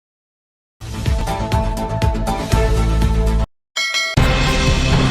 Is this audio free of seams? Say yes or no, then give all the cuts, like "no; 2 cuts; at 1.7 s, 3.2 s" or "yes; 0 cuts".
no; 2 cuts; at 3.1 s, 4.1 s